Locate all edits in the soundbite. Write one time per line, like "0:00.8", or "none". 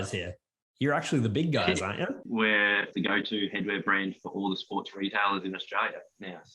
0:02.2
0:02.9

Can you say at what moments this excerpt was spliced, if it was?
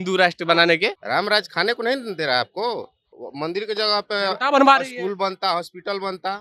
0:01.0
0:03.2

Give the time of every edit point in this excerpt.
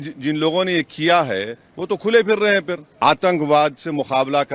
0:02.9

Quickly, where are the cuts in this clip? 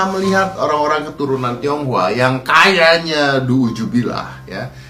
none

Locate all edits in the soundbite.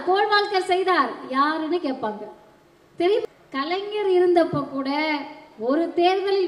0:03.2

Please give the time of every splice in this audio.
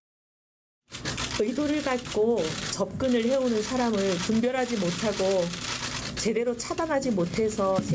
none

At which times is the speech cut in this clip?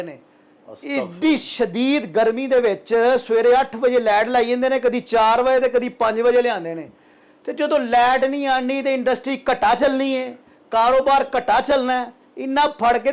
none

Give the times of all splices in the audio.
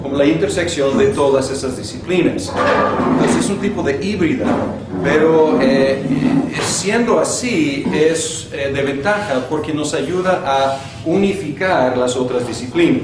0:11.1

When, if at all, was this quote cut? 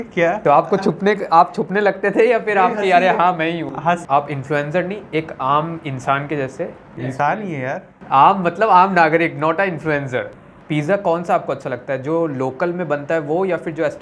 0:04.0
0:10.4

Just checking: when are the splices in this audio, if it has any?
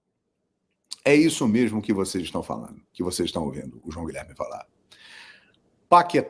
none

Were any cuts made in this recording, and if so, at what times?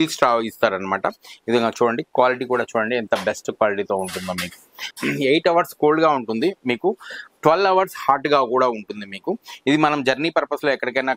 0:04.9

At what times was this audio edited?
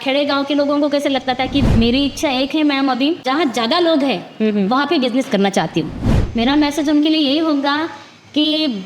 0:01.6
0:03.2
0:06.0

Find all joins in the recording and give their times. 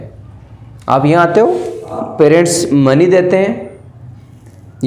0:02.0

